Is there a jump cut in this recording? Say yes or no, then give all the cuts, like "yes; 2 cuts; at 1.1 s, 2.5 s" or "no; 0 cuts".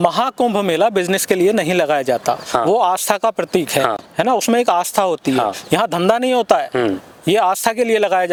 no; 0 cuts